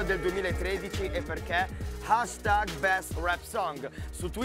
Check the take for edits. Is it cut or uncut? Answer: uncut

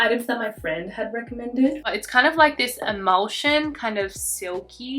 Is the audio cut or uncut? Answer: cut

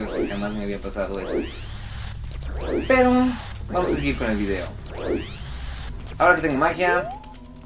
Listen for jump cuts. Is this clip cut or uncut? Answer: cut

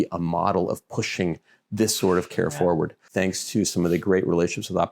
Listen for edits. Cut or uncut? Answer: cut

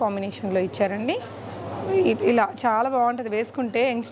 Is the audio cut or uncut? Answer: uncut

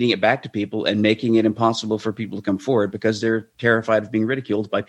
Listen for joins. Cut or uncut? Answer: uncut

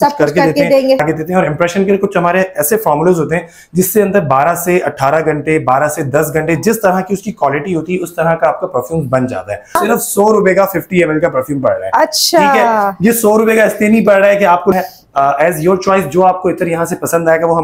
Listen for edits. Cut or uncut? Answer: cut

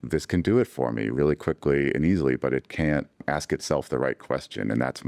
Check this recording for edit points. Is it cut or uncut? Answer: cut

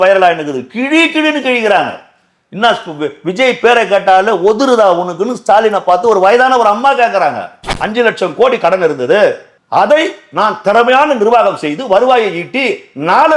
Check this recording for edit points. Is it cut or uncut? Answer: cut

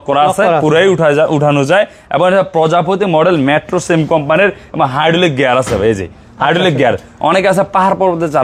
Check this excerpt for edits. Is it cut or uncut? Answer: uncut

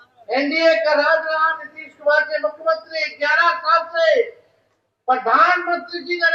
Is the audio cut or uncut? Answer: uncut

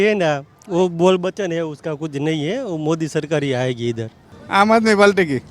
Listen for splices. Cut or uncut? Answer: cut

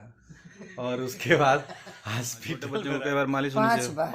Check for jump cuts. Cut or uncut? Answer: cut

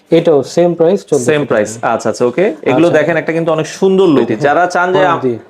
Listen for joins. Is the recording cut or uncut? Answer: cut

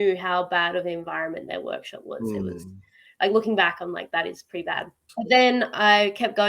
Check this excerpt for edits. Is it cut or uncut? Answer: cut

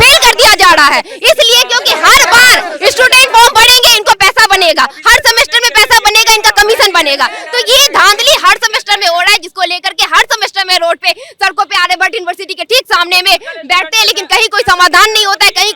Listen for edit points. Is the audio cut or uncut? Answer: uncut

